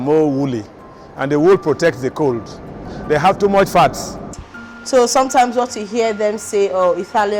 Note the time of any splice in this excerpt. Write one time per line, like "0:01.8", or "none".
0:02.9
0:04.3